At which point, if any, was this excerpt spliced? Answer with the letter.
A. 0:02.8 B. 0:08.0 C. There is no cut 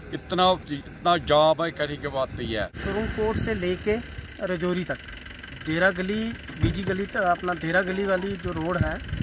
A